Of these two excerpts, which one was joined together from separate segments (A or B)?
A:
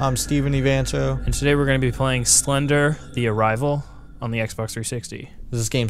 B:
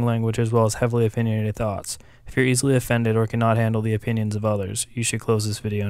A